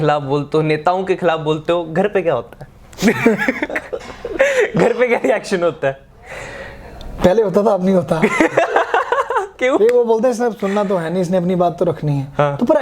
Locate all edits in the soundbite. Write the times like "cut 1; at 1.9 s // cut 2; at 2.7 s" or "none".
none